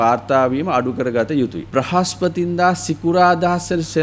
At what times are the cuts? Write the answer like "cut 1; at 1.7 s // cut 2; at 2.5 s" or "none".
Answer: cut 1; at 1.7 s